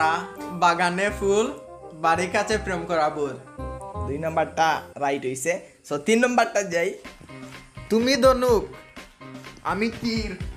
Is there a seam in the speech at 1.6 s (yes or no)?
no